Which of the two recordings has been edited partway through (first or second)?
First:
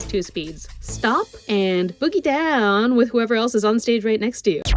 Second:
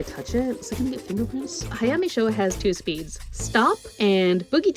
second